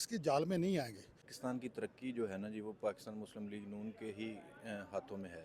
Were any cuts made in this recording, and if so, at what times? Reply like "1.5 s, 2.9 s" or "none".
1.3 s

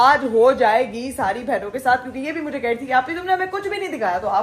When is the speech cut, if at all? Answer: none

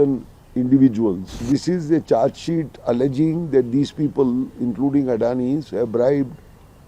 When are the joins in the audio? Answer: 1.4 s

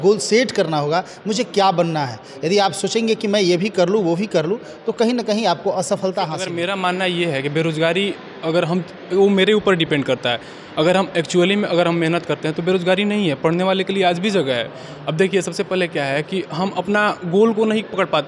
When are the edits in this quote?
6.4 s

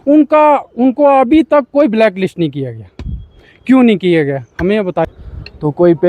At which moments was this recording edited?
5.2 s

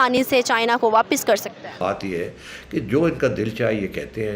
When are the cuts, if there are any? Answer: 1.8 s

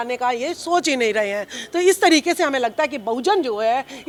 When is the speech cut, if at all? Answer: none

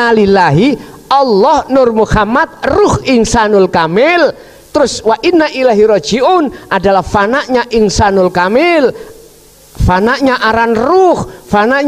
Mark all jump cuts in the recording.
none

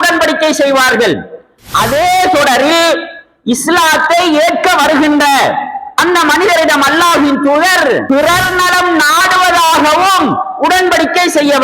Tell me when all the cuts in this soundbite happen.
8.0 s

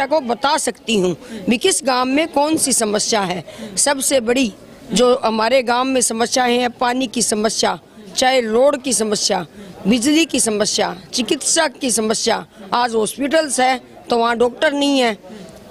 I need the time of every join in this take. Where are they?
none

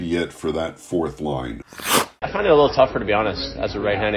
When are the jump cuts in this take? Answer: 1.7 s

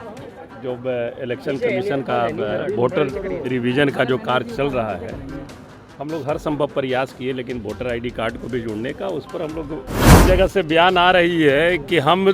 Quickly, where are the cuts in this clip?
10.2 s

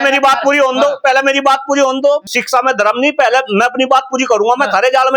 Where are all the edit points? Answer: 2.3 s

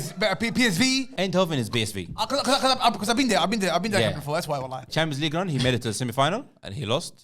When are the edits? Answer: 1.1 s, 4.9 s

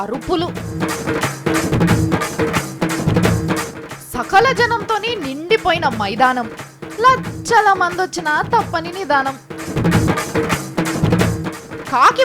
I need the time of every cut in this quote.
10.1 s

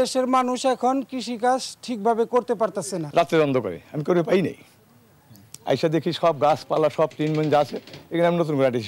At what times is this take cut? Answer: 3.0 s

